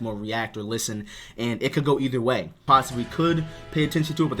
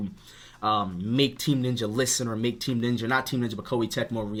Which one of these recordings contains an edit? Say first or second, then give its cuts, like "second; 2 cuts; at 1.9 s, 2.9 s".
first; 1 cut; at 2.6 s